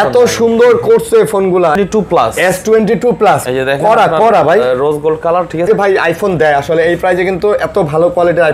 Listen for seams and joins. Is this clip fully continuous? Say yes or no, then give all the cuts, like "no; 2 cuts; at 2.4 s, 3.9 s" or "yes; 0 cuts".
no; 2 cuts; at 1.8 s, 5.7 s